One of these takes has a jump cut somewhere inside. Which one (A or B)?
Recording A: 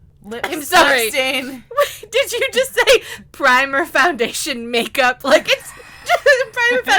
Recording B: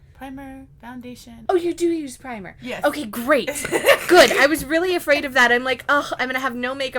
B